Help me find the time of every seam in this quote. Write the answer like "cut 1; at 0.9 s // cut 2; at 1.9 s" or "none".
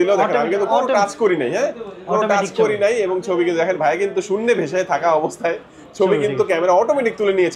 none